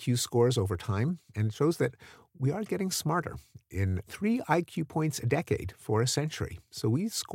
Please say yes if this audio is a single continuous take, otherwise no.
no